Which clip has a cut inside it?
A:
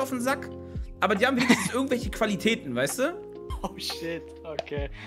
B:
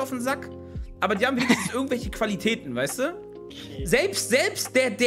B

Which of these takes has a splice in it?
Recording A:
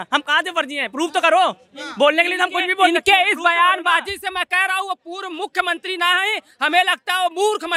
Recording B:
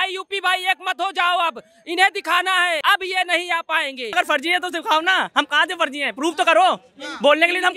B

